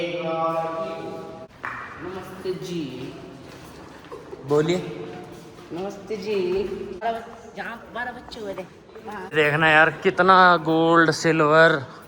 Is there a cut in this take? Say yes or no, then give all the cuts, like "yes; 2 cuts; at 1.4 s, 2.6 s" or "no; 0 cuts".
yes; 3 cuts; at 1.4 s, 7.0 s, 9.2 s